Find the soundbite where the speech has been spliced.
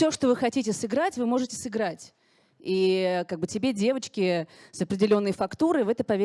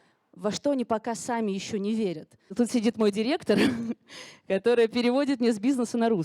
second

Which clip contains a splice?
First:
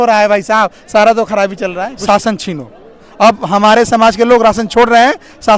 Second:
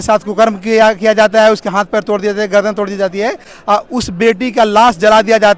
first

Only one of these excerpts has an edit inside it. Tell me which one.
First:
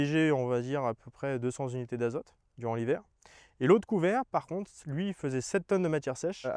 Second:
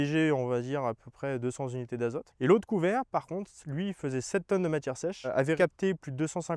second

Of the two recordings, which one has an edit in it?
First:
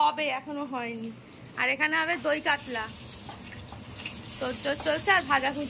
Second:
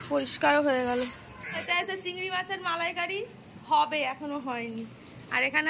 second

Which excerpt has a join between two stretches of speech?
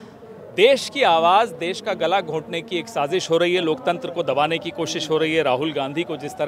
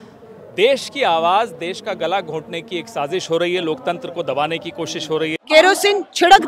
second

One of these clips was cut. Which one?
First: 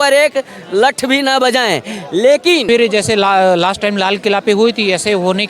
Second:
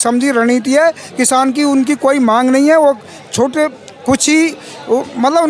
first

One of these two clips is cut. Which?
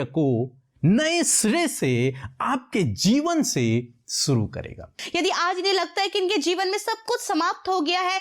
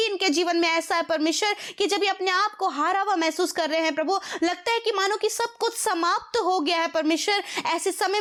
first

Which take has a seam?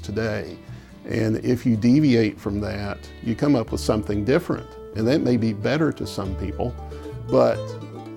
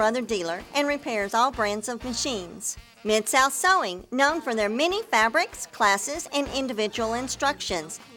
first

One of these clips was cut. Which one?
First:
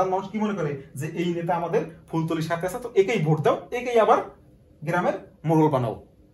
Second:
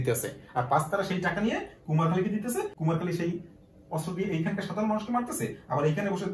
second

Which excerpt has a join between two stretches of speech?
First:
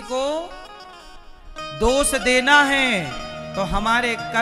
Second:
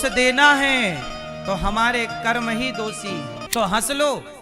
second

